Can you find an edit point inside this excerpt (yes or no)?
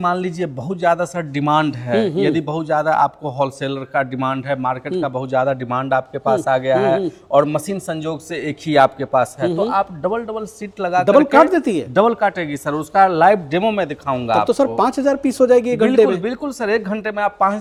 no